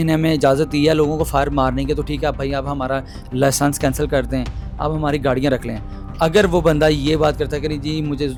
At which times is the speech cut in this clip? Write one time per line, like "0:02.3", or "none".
none